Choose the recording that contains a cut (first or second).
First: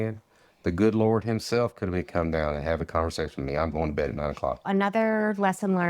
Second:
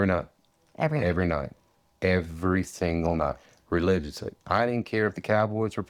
first